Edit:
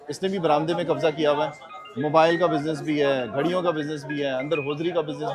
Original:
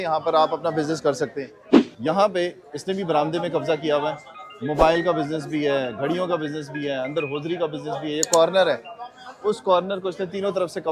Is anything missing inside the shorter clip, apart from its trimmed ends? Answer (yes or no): no